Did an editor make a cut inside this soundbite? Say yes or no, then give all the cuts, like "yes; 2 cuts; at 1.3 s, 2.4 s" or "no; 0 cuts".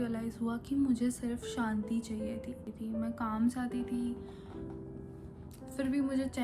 yes; 1 cut; at 2.7 s